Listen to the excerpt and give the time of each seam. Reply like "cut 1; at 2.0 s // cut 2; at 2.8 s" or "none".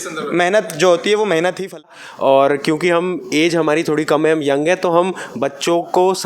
cut 1; at 1.9 s

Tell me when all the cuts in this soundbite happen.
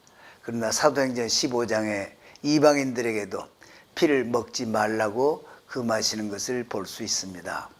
none

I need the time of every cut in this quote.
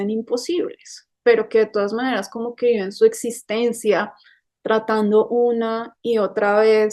cut 1; at 1.1 s

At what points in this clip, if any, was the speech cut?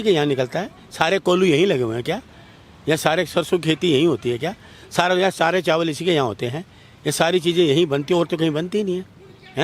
none

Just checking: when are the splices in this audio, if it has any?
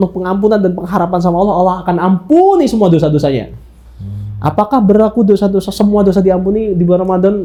none

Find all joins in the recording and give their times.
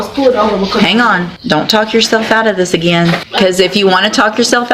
cut 1; at 1.3 s // cut 2; at 3.3 s

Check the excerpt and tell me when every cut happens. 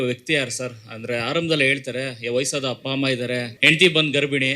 cut 1; at 3.5 s

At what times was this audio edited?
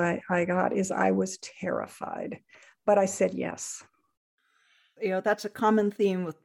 cut 1; at 4.8 s

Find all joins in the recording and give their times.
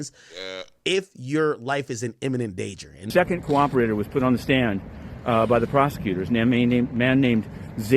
cut 1; at 2.9 s

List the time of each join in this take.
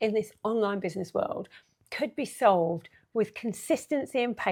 none

